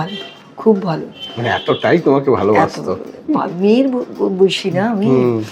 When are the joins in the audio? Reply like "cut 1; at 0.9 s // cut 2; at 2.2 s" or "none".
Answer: none